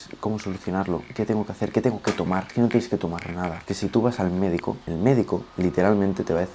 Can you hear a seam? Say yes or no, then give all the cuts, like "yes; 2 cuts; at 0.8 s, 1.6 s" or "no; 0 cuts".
yes; 4 cuts; at 2.5 s, 3.6 s, 4.8 s, 5.5 s